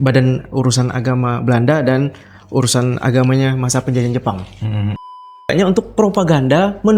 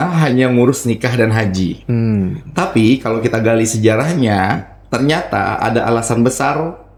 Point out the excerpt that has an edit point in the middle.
first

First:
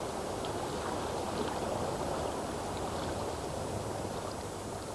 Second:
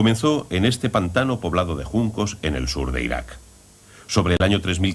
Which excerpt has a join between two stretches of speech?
first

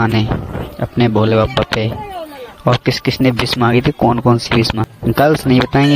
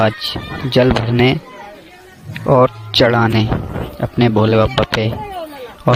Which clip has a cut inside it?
first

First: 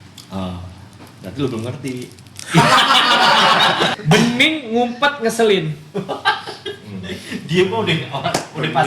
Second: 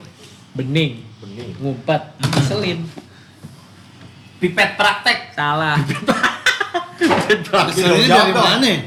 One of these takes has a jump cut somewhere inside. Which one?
first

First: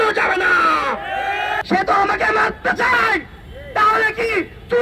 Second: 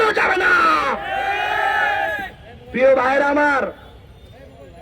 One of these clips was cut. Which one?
first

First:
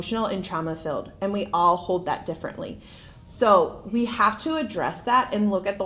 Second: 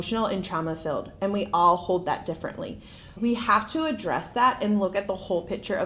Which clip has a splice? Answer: second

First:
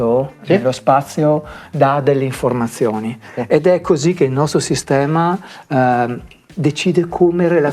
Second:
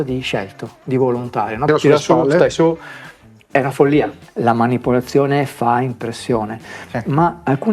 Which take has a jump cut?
second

